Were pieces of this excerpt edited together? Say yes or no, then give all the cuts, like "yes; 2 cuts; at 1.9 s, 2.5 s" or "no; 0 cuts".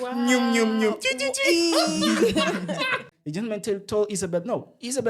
yes; 1 cut; at 3.1 s